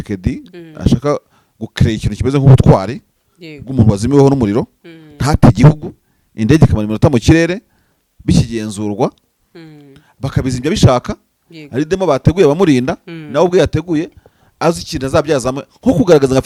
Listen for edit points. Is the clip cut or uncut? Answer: uncut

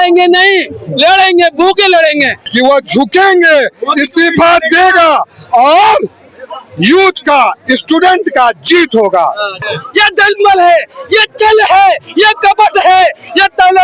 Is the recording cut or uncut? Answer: cut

